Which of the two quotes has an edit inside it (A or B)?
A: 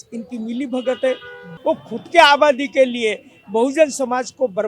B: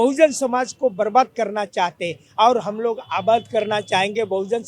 A